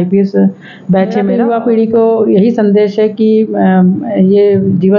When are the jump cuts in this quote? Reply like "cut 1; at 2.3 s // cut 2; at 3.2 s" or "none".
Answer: cut 1; at 1.3 s